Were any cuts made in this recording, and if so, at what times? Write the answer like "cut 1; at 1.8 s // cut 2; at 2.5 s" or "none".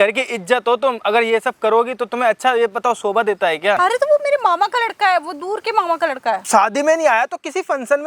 cut 1; at 3.8 s // cut 2; at 6.4 s